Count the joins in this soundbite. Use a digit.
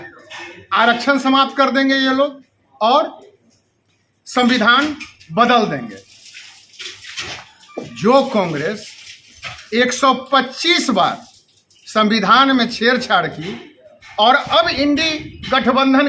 0